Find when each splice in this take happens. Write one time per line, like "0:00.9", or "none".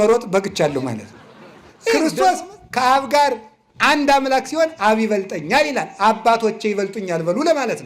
0:02.0

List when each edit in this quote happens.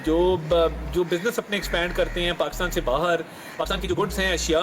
0:03.7

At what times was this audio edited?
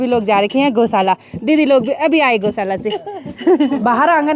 none

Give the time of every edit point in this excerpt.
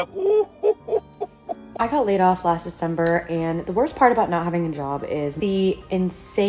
0:01.7
0:05.4

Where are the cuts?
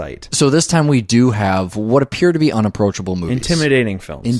0:02.5

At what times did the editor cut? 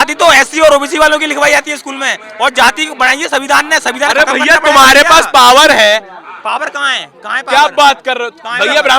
none

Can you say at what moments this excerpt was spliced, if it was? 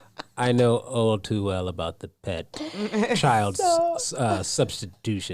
none

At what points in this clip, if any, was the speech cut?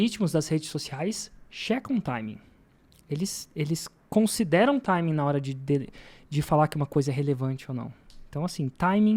none

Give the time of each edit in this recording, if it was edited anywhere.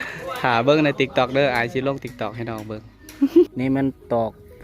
0:03.5

